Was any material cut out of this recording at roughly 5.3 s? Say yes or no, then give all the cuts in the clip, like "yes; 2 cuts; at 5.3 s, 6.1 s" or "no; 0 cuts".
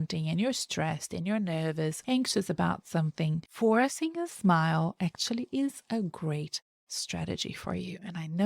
no; 2 cuts; at 2.0 s, 3.5 s